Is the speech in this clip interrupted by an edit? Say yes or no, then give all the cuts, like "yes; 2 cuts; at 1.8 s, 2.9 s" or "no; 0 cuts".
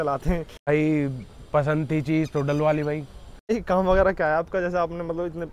yes; 2 cuts; at 0.7 s, 3.5 s